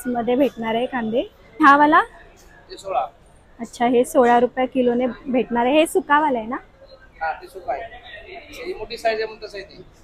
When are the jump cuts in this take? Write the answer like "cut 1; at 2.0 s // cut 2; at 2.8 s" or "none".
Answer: none